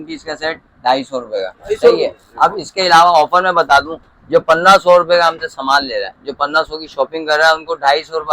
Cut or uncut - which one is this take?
uncut